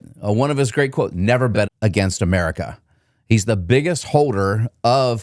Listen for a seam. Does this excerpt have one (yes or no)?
yes